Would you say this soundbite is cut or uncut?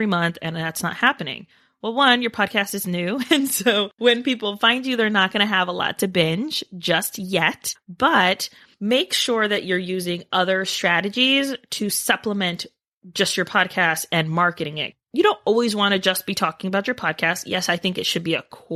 uncut